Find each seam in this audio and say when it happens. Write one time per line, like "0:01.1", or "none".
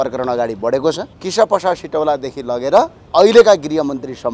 0:01.1
0:03.0